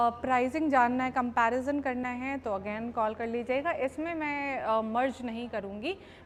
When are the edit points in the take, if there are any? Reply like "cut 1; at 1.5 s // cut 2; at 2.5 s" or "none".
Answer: none